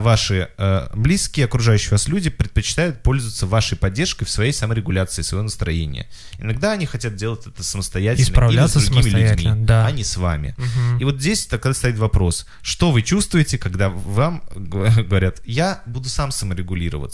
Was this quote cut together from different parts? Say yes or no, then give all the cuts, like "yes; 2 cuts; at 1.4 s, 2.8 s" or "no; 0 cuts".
no; 0 cuts